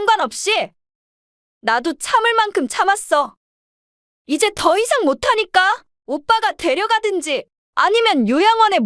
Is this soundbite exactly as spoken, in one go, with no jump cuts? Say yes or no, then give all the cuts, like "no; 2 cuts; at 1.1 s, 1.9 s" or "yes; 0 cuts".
no; 2 cuts; at 5.9 s, 7.6 s